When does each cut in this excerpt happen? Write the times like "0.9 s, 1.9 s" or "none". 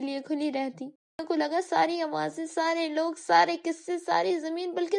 1.2 s